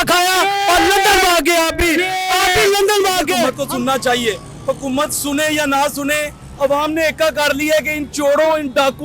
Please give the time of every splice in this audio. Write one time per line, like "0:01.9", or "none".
0:03.5